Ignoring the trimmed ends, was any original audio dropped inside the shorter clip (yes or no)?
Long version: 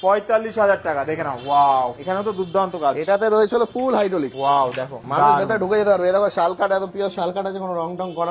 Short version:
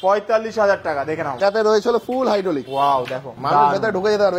yes